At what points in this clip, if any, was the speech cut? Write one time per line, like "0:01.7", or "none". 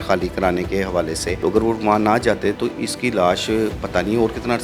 0:01.3